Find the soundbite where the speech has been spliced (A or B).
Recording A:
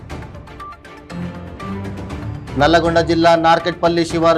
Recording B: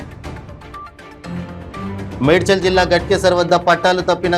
B